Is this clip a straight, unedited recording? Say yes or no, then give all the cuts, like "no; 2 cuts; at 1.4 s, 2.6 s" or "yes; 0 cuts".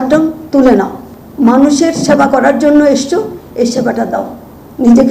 yes; 0 cuts